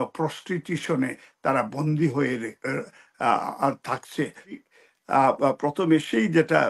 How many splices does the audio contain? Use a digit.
1